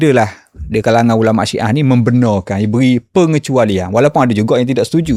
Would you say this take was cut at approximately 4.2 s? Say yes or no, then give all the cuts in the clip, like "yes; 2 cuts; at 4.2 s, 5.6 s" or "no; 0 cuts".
no; 0 cuts